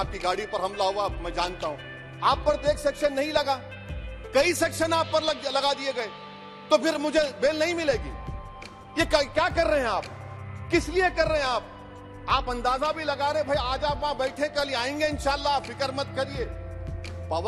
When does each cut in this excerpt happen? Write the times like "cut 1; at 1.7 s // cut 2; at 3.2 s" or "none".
none

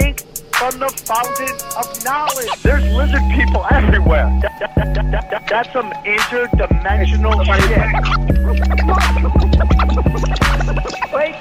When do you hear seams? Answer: cut 1; at 0.9 s

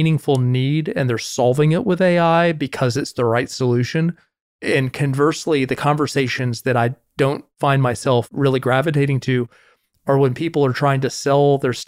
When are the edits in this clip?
none

